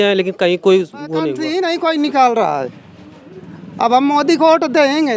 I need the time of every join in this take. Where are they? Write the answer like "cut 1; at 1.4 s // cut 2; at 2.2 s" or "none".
cut 1; at 1.4 s